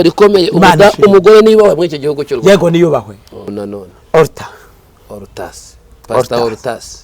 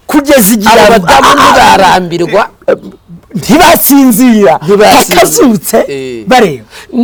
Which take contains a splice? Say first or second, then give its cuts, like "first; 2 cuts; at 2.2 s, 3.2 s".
first; 1 cut; at 3.6 s